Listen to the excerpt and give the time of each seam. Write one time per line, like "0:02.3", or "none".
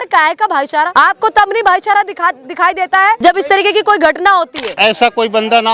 0:00.9
0:03.2
0:04.6